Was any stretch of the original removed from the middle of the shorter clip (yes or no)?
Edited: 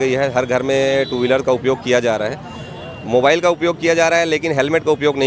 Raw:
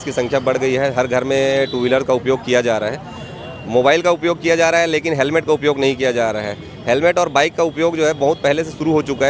no